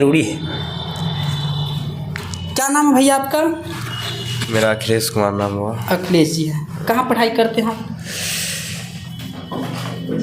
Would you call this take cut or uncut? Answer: uncut